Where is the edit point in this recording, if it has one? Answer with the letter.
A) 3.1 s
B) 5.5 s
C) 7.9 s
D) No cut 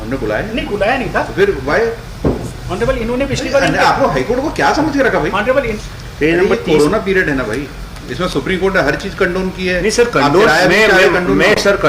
B